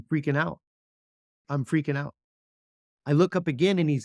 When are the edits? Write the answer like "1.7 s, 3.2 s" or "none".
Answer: 1.5 s